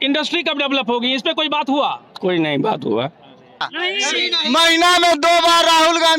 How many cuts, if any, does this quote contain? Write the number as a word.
one